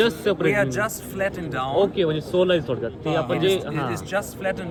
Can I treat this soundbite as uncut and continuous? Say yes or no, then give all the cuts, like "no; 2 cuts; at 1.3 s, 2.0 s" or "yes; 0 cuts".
yes; 0 cuts